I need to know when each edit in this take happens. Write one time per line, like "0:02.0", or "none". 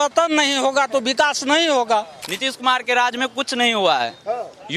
0:02.2